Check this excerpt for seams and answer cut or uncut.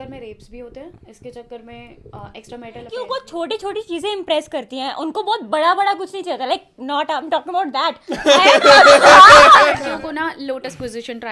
cut